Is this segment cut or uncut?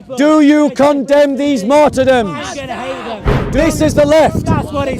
cut